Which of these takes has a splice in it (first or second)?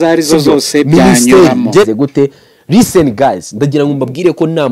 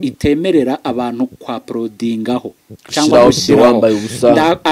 first